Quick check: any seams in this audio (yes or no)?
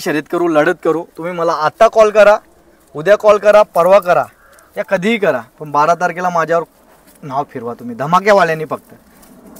no